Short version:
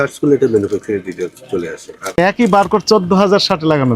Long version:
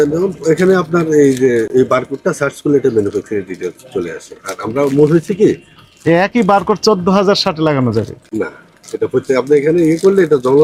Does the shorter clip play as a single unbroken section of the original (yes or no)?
no